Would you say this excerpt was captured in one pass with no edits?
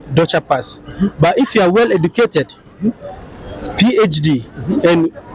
yes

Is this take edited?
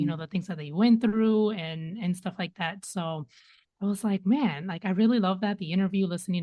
no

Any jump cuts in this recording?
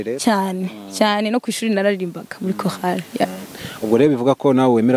yes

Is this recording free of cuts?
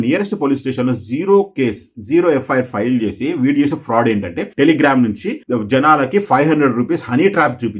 yes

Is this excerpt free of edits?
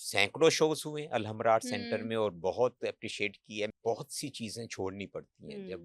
no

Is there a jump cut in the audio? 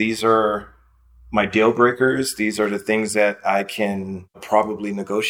yes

